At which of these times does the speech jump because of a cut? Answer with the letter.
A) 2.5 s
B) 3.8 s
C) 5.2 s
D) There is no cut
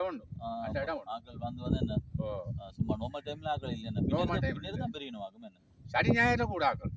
D